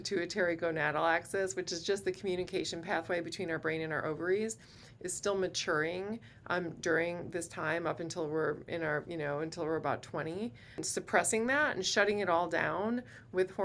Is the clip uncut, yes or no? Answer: no